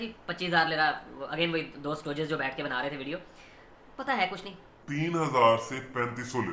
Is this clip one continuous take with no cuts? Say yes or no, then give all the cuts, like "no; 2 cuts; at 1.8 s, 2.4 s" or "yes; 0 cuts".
yes; 0 cuts